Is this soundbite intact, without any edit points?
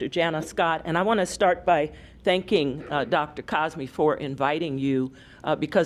yes; 0 cuts

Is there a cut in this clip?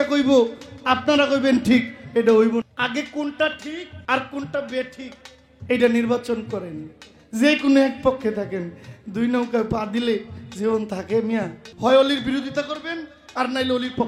yes; 3 cuts; at 2.7 s, 3.9 s, 11.6 s

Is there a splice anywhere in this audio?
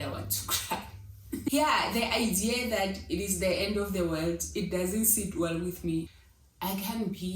yes; 2 cuts; at 1.5 s, 6.1 s

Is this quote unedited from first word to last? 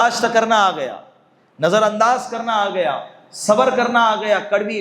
yes; 0 cuts

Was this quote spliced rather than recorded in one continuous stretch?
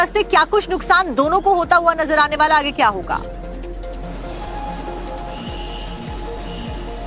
no; 0 cuts

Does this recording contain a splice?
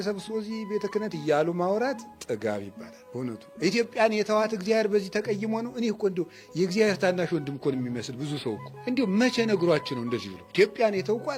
no; 0 cuts

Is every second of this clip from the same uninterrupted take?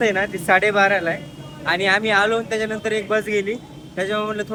yes; 0 cuts

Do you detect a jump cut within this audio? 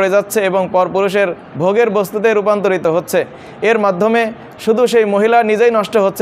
no; 0 cuts

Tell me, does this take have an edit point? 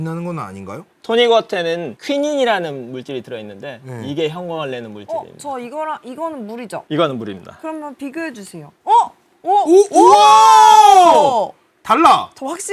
no; 0 cuts

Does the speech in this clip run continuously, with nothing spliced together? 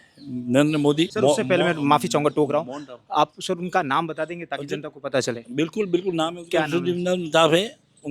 no; 1 cut; at 1.1 s

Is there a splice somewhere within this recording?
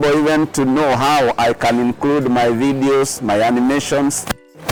no; 0 cuts

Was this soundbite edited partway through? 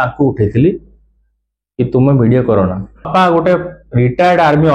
yes; 1 cut; at 2.9 s

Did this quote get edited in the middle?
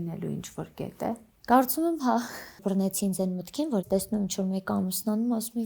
yes; 3 cuts; at 1.3 s, 2.6 s, 3.8 s

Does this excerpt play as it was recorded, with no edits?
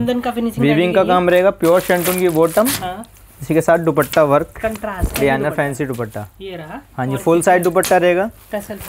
yes; 0 cuts

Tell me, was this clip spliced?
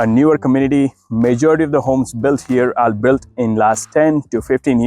no; 0 cuts

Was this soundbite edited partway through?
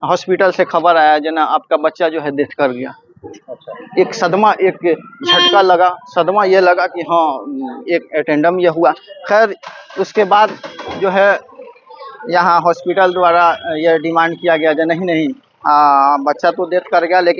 no; 0 cuts

